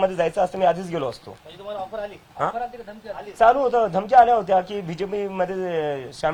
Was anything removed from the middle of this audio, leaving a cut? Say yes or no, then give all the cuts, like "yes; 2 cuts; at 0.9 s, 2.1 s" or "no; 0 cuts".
no; 0 cuts